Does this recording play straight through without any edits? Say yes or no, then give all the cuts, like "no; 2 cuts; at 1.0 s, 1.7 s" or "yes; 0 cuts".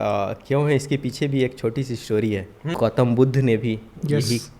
no; 1 cut; at 2.7 s